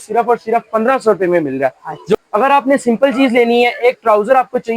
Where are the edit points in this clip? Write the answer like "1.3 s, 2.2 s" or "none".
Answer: 2.2 s